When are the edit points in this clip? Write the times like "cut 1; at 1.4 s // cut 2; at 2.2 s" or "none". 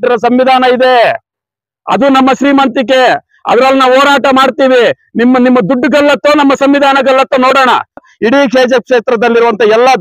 cut 1; at 8.0 s